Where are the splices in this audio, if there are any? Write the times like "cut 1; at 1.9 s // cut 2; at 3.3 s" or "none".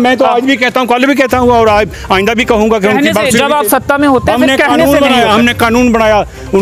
none